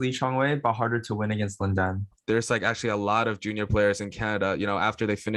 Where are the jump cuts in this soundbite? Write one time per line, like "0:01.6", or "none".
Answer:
0:02.1